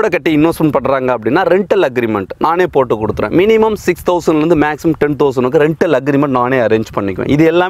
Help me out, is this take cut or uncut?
uncut